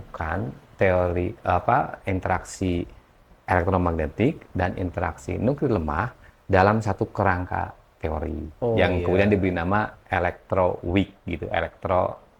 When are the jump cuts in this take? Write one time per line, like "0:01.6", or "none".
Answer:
none